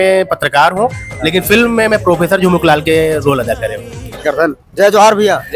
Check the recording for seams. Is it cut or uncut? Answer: cut